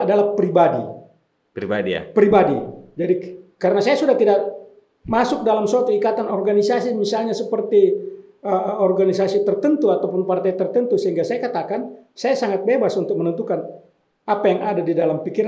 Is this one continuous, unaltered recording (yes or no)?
yes